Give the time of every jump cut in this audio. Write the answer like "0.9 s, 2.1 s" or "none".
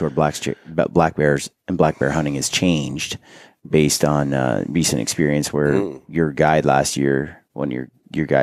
none